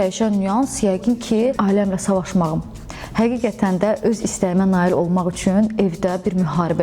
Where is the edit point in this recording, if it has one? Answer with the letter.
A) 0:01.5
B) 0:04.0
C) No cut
A